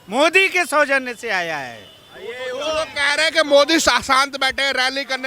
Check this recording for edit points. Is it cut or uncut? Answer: uncut